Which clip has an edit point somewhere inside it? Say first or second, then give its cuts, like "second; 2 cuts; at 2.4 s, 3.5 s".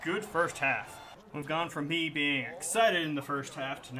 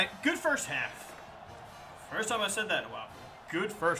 first; 1 cut; at 1.4 s